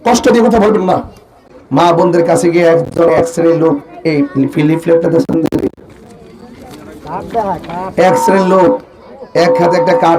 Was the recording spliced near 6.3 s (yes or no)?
no